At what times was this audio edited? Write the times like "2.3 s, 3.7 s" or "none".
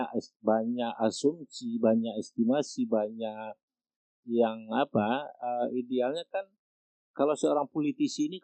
none